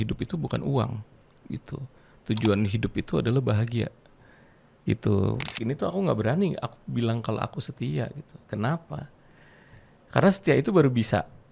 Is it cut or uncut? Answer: cut